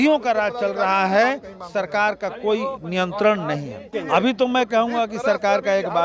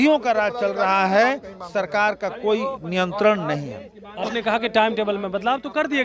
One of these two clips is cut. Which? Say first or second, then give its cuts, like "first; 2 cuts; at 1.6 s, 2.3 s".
first; 1 cut; at 3.8 s